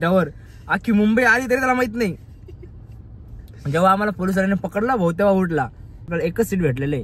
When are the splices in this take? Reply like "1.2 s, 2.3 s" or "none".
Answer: 6.1 s